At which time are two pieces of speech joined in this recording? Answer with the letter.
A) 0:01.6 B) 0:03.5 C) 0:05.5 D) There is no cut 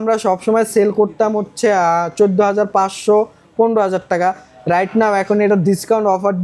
D